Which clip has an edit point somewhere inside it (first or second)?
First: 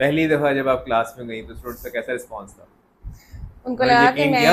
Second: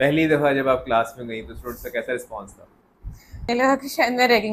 second